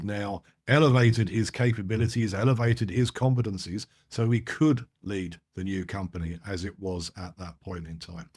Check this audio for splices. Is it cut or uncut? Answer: uncut